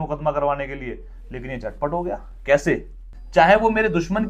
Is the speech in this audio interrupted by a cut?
yes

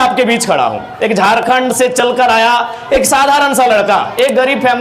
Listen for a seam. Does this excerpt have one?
no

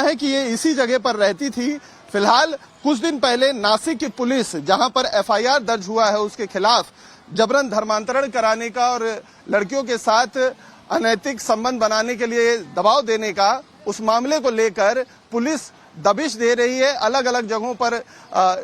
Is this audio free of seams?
no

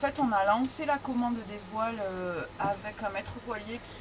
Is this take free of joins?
yes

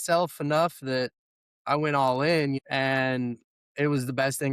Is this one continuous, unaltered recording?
no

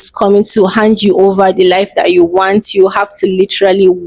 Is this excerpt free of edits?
yes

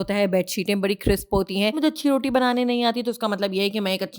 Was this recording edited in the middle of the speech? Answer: yes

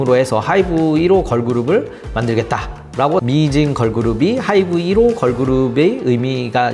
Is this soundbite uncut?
no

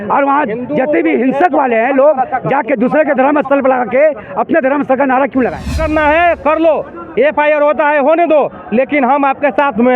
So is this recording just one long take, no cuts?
no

